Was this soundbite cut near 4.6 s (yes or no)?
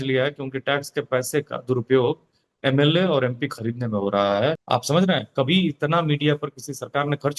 yes